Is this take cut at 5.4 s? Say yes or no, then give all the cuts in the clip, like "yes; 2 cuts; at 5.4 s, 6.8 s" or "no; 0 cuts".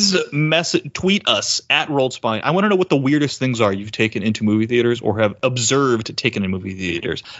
yes; 1 cut; at 5.4 s